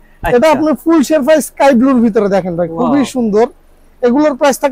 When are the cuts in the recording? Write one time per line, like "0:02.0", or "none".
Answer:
none